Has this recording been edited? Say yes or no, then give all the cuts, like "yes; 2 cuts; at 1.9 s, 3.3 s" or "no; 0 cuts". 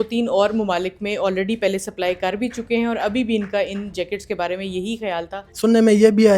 yes; 1 cut; at 5.5 s